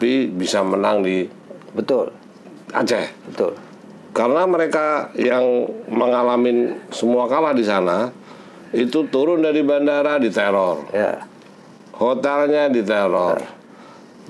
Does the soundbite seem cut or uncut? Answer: uncut